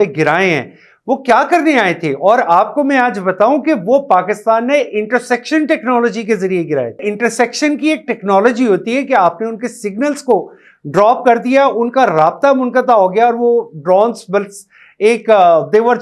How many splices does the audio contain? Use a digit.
1